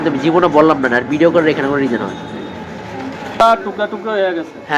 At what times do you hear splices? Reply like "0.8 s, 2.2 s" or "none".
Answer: 3.4 s